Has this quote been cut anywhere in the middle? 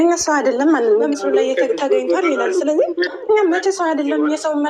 yes; 1 cut; at 1.1 s

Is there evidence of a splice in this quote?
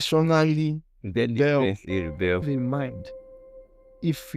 yes; 1 cut; at 2.5 s

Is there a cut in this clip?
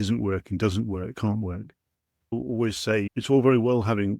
no; 0 cuts

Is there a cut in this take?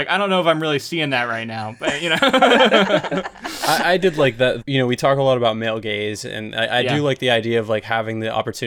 yes; 1 cut; at 4.6 s

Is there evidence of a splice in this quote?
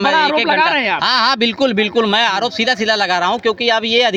no; 0 cuts

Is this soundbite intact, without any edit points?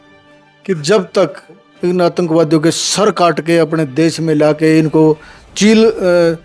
no; 1 cut; at 1.7 s

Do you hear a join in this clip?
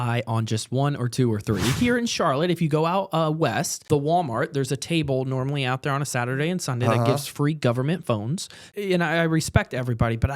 yes; 3 cuts; at 1.8 s, 3.8 s, 8.7 s

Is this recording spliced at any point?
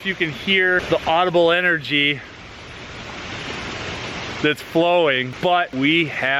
no; 0 cuts

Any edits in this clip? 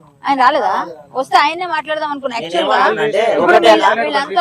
no; 0 cuts

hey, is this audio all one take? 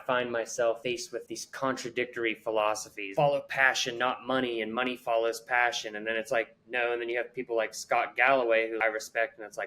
no; 3 cuts; at 0.8 s, 3.1 s, 8.8 s

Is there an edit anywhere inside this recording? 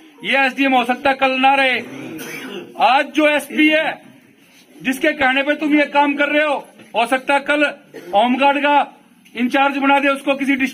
no; 0 cuts

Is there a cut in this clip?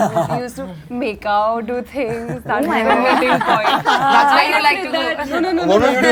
no; 0 cuts

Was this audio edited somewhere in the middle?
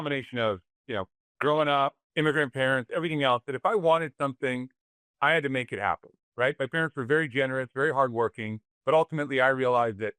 yes; 2 cuts; at 1.2 s, 2.0 s

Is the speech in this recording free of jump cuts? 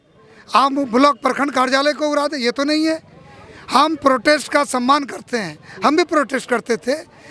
yes; 0 cuts

